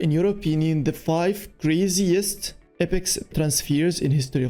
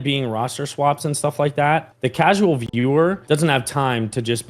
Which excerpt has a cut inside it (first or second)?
second